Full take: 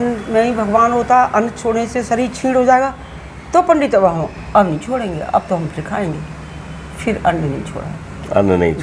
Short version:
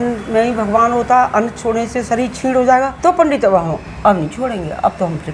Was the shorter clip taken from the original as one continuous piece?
no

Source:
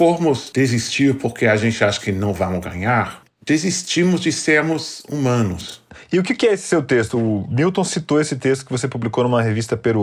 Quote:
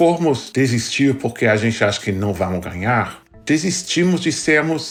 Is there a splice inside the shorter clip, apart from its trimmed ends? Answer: no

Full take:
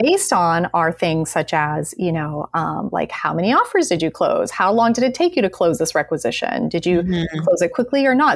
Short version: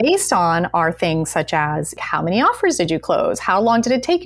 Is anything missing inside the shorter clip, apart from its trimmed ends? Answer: yes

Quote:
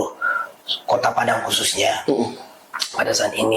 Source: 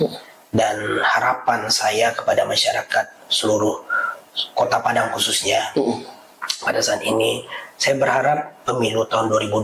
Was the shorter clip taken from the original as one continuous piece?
yes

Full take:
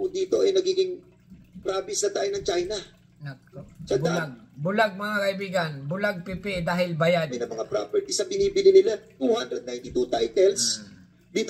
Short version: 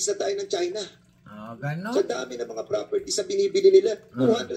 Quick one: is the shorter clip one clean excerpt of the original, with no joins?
no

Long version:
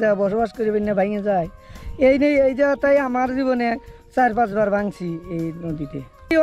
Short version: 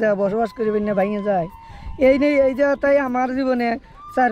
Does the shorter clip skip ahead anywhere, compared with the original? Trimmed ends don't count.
no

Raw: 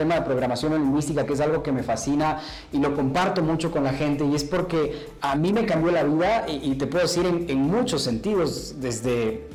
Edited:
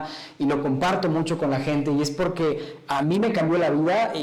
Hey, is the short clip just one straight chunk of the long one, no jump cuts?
yes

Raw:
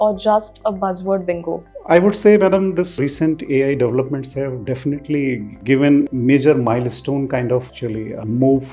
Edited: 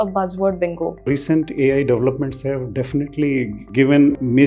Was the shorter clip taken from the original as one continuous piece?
no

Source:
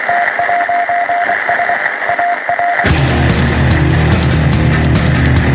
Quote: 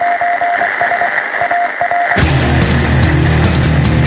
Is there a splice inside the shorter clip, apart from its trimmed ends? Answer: no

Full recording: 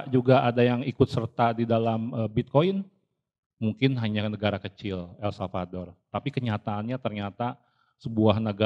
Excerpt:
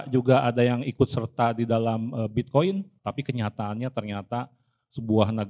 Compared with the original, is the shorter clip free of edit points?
no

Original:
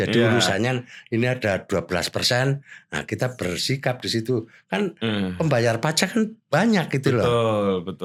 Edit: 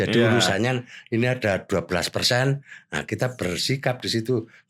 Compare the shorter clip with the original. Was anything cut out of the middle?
no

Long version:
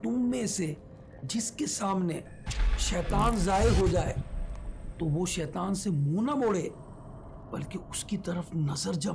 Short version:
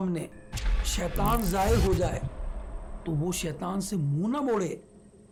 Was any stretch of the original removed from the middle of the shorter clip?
no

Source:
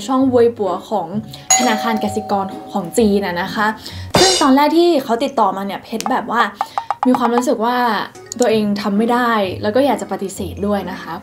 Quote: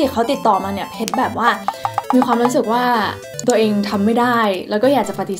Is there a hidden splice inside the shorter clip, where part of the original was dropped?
no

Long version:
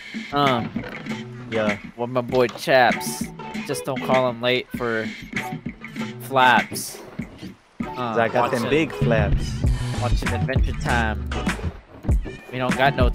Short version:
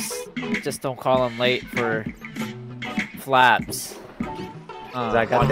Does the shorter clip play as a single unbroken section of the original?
yes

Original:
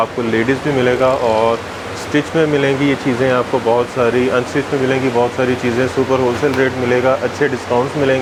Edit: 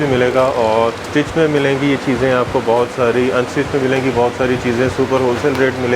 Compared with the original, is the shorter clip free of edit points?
no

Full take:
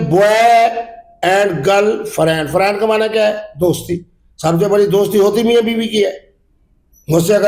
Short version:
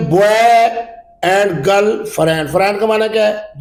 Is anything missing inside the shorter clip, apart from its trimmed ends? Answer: no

